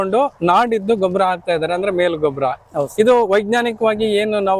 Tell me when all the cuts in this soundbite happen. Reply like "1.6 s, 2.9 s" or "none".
none